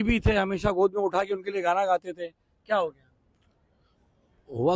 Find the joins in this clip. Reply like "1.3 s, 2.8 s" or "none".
none